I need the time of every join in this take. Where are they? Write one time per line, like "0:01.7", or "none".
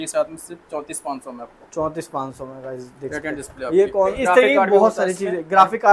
0:04.2